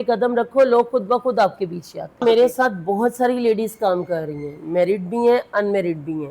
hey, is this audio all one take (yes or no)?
no